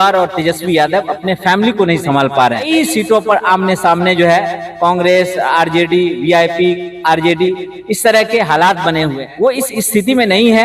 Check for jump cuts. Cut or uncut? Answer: cut